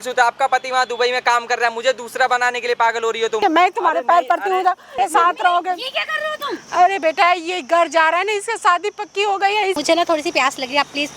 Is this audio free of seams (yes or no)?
no